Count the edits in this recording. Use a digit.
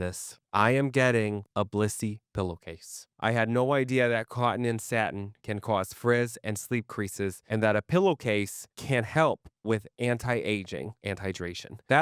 2